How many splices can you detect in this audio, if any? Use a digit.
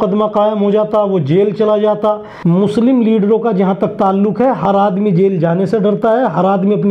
1